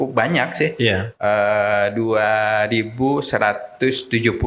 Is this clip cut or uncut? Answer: uncut